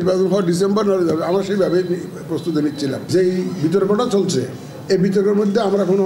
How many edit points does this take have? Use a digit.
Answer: 1